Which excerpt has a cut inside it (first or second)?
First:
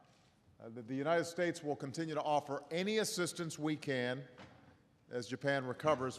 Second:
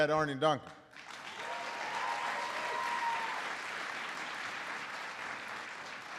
second